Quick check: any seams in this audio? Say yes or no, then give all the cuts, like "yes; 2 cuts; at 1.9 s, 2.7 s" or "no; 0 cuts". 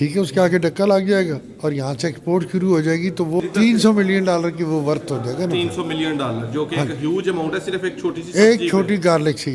yes; 1 cut; at 3.4 s